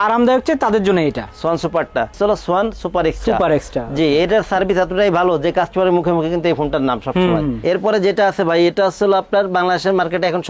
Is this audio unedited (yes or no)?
no